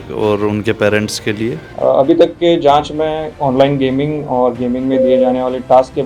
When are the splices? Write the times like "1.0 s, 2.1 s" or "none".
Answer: 1.6 s, 3.3 s